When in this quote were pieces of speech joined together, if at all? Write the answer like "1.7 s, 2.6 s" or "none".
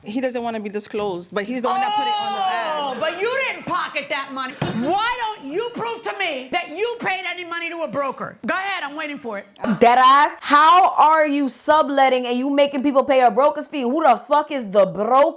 4.5 s, 9.5 s